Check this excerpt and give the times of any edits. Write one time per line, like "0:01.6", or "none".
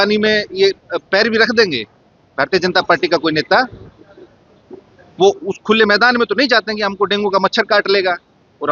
none